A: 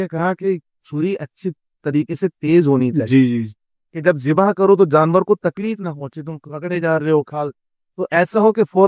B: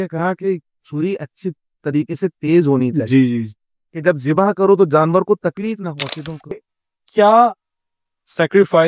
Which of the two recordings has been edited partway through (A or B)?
B